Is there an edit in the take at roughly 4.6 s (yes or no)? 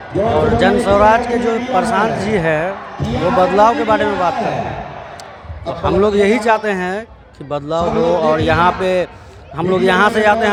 no